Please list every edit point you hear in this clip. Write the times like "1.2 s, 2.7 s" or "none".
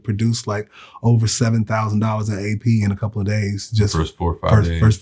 none